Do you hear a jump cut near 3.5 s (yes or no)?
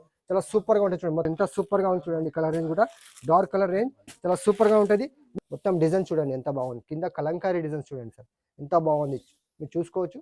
no